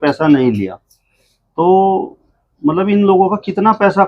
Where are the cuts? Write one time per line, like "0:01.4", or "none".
none